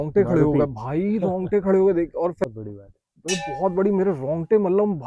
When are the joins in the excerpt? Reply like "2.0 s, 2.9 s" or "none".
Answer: 2.5 s